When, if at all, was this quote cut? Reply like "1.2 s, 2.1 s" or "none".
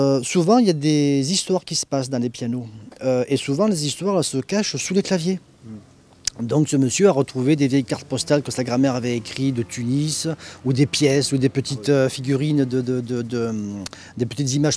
2.9 s